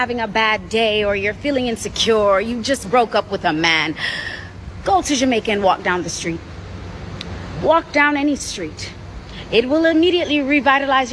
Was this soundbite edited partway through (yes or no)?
no